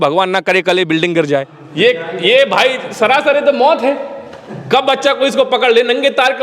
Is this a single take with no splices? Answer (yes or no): no